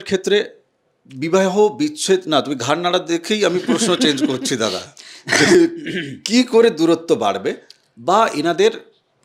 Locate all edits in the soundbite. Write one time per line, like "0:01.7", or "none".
none